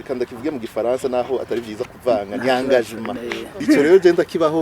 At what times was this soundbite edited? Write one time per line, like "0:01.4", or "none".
0:03.6